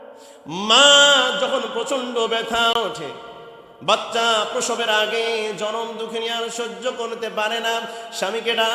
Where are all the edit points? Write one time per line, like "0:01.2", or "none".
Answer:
none